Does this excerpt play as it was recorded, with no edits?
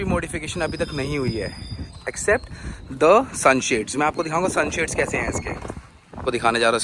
yes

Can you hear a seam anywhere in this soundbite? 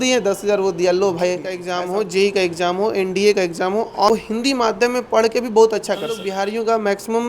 yes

